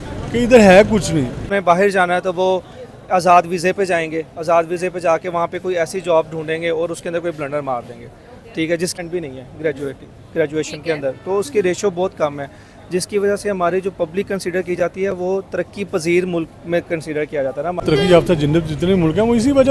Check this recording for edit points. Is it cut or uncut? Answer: cut